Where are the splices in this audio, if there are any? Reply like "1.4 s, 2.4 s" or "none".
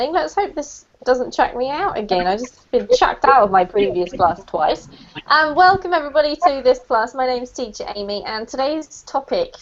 none